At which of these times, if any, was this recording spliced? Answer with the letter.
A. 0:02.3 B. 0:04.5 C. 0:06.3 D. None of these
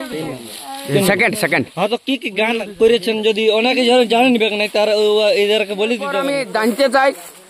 C